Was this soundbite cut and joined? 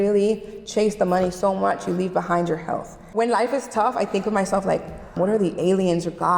yes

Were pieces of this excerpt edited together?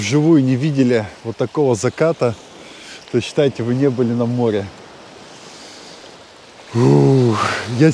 no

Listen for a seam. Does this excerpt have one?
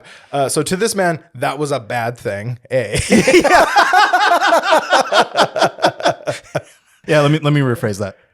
yes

